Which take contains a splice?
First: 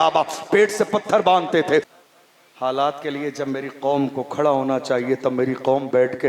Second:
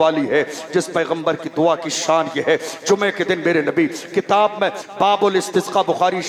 first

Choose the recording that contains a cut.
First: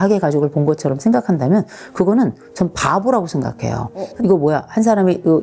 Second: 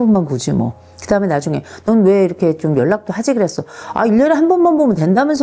first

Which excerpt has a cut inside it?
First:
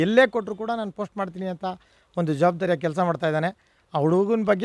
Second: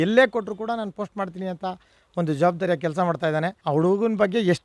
second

